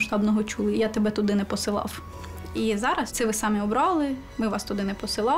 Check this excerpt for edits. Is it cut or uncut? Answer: cut